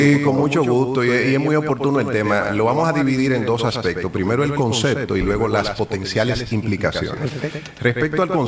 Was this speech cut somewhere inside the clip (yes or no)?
no